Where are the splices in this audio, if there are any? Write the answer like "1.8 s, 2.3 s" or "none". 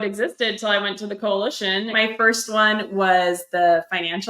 1.9 s